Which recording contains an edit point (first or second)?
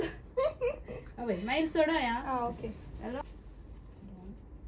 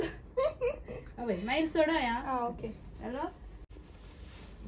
second